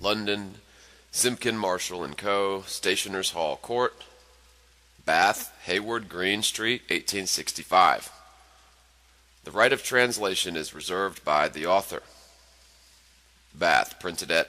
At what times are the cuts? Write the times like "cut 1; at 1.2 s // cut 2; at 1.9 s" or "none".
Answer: cut 1; at 7.6 s